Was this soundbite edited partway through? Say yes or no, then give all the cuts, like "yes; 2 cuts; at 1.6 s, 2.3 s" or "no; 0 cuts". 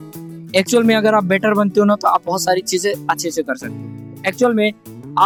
no; 0 cuts